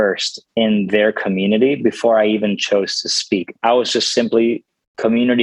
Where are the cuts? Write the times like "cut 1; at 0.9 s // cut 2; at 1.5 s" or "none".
cut 1; at 3.5 s